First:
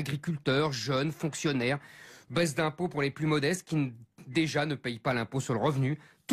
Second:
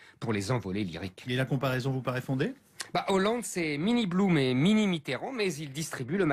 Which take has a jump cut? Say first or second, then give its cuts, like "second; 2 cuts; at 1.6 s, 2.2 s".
second; 1 cut; at 5.1 s